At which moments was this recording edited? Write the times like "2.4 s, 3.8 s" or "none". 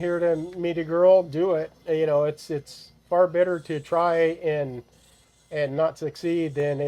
none